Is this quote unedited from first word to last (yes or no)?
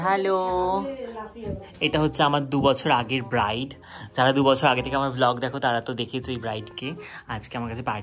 yes